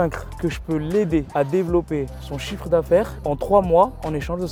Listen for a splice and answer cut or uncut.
uncut